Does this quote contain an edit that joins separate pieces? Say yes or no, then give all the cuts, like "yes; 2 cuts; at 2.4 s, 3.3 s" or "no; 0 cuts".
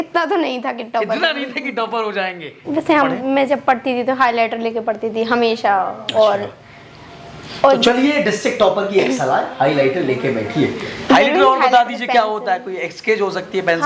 yes; 1 cut; at 2.6 s